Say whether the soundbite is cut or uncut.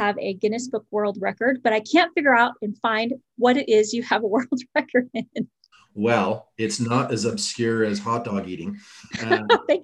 uncut